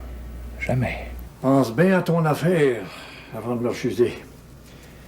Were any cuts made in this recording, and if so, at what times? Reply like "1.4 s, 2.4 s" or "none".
1.2 s

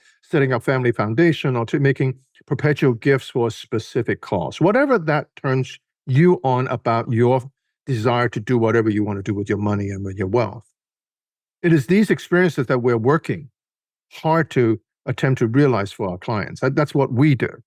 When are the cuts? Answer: none

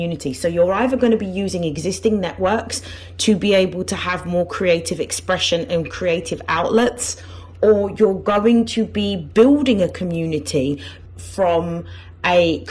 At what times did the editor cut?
10.9 s

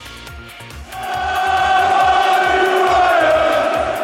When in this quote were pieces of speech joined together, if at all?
0.9 s

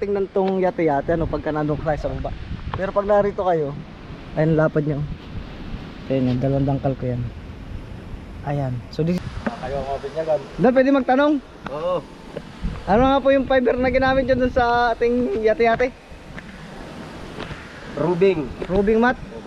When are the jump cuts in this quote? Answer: 9.2 s

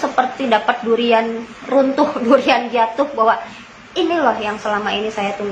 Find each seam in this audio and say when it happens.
none

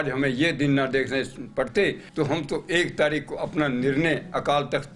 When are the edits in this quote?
2.0 s

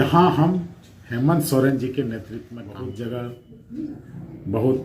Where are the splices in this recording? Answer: 2.4 s

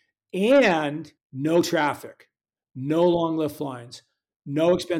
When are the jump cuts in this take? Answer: none

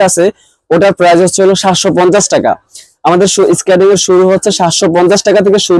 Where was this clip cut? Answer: none

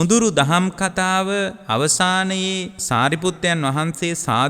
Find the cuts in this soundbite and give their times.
2.8 s

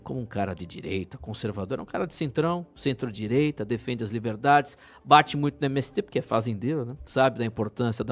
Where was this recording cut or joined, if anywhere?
none

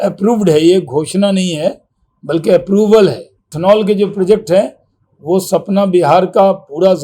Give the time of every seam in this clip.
3.5 s

